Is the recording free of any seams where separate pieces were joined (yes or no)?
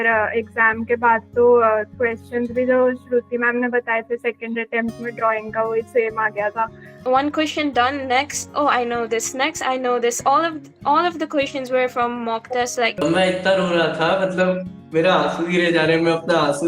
no